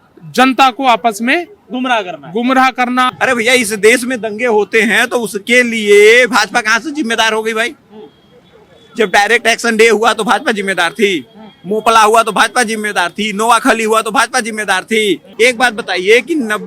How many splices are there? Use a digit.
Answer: 2